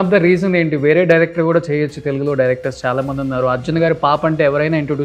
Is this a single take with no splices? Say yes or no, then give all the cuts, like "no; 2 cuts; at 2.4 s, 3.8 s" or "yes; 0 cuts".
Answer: yes; 0 cuts